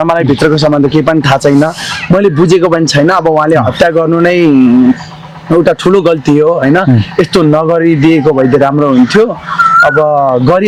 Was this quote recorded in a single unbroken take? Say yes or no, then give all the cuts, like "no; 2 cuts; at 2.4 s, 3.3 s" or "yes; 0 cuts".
yes; 0 cuts